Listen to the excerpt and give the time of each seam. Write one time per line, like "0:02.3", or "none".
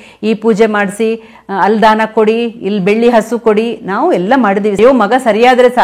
0:04.8